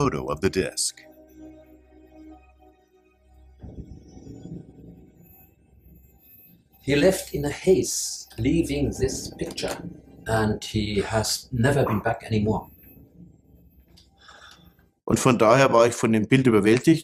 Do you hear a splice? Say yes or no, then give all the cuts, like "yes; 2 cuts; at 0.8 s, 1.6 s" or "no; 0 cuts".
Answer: no; 0 cuts